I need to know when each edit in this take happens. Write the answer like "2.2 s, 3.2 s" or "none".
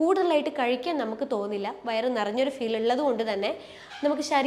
none